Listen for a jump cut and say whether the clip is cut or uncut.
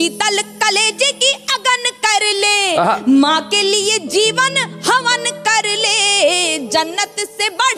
uncut